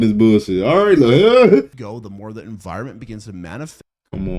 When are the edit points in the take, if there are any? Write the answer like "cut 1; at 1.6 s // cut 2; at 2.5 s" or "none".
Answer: cut 1; at 1.7 s